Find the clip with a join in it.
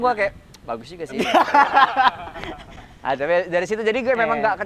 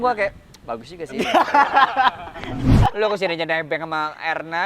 second; 1 cut; at 2.8 s

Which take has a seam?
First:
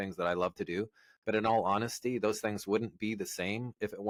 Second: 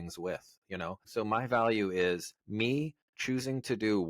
second; 2 cuts; at 1.0 s, 2.4 s

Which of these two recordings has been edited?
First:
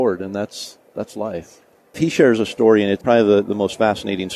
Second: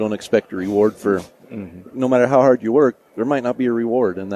first; 2 cuts; at 1.8 s, 3.0 s

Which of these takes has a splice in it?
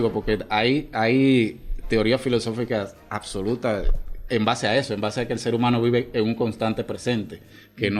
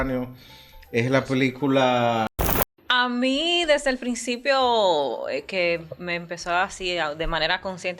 second; 1 cut; at 2.5 s

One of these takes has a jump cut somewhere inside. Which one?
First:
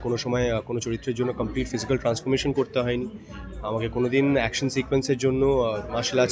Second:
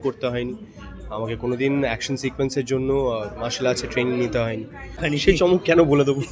second; 1 cut; at 4.9 s

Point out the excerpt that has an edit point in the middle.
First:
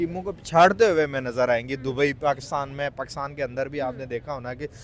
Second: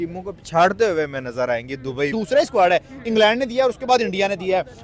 second; 1 cut; at 2.1 s

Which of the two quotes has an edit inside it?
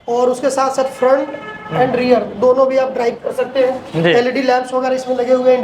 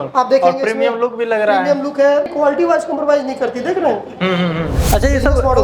second; 2 cuts; at 2.3 s, 4.8 s

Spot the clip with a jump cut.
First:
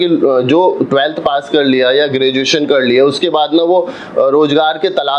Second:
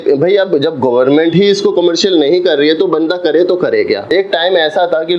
second; 1 cut; at 4.1 s

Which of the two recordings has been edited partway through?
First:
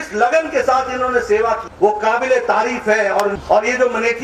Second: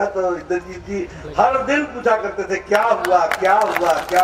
first; 2 cuts; at 1.7 s, 3.3 s

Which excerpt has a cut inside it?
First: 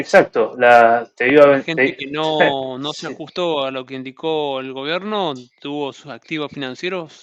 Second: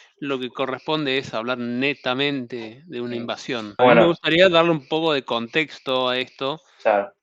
second; 1 cut; at 3.8 s

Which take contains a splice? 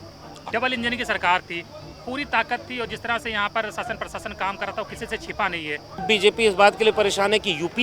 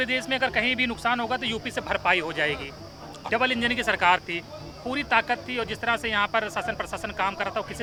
first; 1 cut; at 6.0 s

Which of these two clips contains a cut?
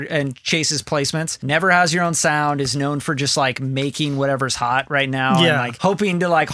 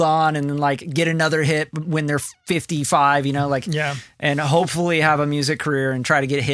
first; 2 cuts; at 1.4 s, 5.7 s

